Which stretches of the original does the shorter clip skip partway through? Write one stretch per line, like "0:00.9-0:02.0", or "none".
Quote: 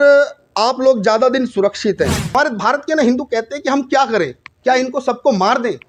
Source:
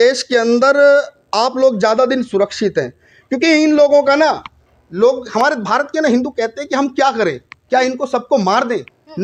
0:03.1-0:05.4